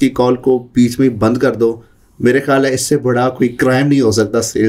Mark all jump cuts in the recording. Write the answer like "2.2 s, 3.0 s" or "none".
none